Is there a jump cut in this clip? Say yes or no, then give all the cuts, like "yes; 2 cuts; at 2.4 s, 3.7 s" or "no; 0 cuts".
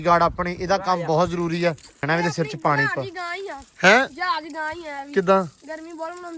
yes; 1 cut; at 2.0 s